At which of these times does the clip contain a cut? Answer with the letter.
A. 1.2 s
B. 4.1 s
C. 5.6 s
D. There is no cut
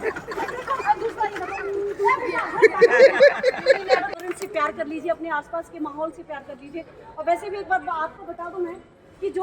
B